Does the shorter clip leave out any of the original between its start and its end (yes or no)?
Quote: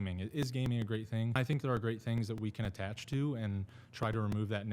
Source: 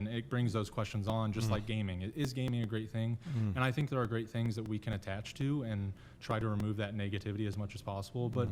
yes